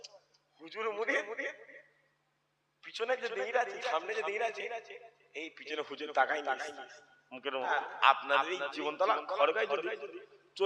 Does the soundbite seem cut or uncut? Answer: cut